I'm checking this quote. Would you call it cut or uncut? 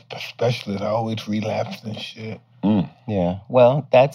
uncut